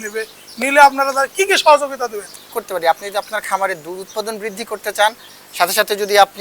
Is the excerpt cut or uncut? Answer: cut